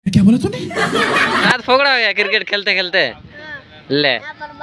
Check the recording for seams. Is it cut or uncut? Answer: cut